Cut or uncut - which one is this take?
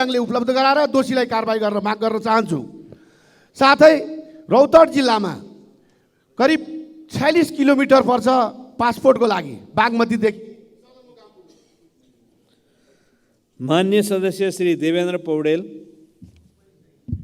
uncut